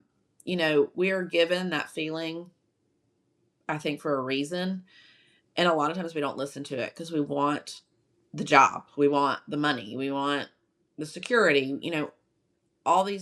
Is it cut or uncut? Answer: uncut